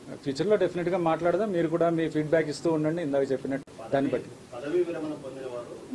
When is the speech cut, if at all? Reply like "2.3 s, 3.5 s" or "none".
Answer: 3.7 s

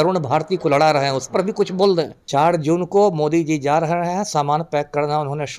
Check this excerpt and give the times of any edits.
2.2 s

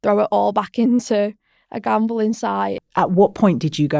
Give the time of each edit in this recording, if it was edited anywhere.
2.8 s

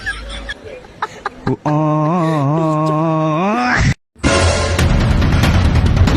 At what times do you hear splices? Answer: 4.1 s

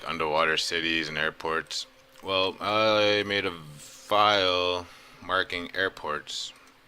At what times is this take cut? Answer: 2.9 s

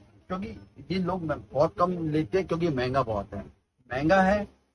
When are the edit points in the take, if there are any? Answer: none

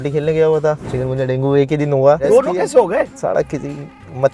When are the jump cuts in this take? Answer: 0.9 s, 2.2 s, 3.1 s

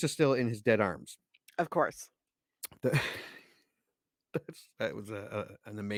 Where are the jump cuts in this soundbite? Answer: none

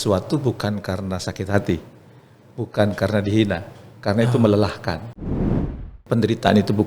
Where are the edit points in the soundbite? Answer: 5.5 s

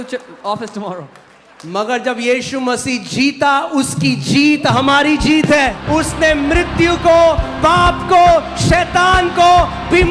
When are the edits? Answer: 5.8 s

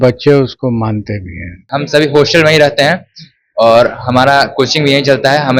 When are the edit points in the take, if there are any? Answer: 1.7 s

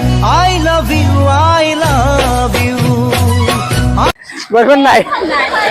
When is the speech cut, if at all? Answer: none

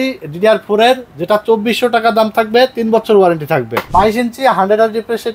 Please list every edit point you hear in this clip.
3.9 s

